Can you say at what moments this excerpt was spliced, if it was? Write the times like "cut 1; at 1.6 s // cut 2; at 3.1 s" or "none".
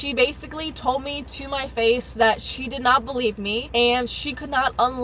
none